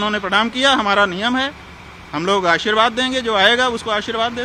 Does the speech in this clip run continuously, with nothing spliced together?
yes; 0 cuts

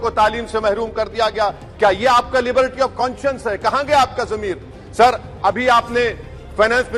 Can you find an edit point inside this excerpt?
no; 0 cuts

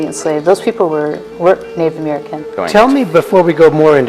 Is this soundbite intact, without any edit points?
no; 1 cut; at 2.5 s

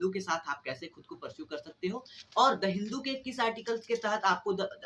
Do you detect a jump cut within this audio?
no; 0 cuts

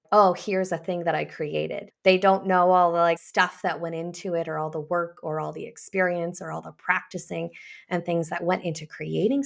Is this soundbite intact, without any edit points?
no; 2 cuts; at 1.9 s, 3.2 s

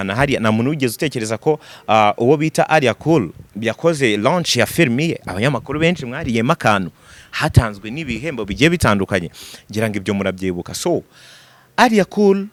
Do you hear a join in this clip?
no; 0 cuts

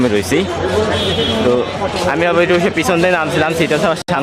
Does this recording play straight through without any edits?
yes; 0 cuts

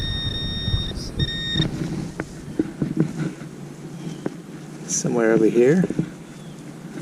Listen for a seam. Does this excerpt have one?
no; 0 cuts

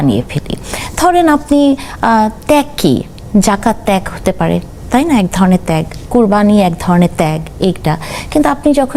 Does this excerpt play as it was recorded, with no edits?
yes; 0 cuts

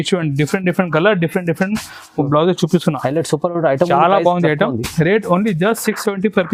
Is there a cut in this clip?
no; 0 cuts

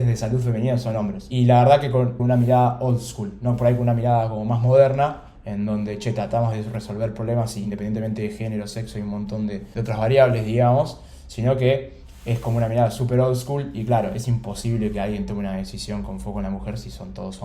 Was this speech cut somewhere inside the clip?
yes; 3 cuts; at 1.3 s, 2.2 s, 7.6 s

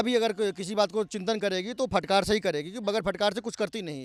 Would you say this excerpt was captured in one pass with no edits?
yes; 0 cuts

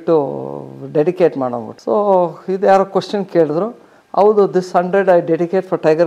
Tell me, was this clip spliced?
no; 0 cuts

